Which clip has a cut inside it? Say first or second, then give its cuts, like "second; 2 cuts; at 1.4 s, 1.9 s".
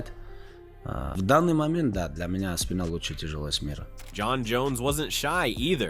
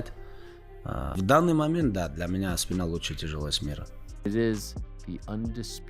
second; 1 cut; at 4.1 s